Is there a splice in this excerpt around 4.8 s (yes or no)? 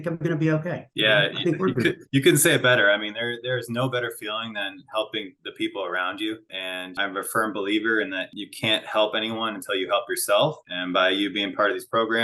no